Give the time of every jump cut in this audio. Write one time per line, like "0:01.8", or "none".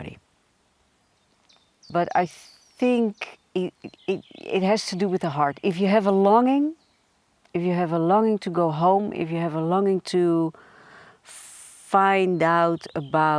0:01.9